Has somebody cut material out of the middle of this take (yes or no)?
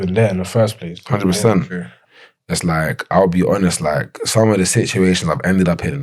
yes